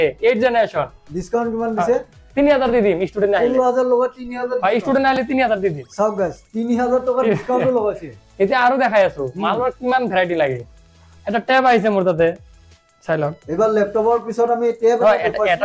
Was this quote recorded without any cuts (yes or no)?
yes